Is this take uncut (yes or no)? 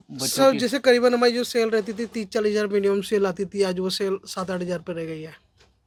yes